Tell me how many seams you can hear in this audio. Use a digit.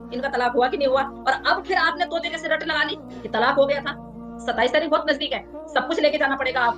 0